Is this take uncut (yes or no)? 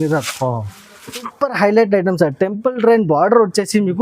no